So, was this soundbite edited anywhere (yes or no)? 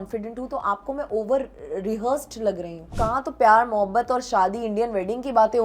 yes